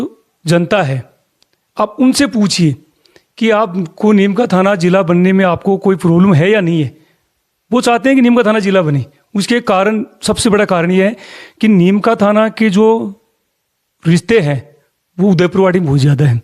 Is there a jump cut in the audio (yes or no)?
no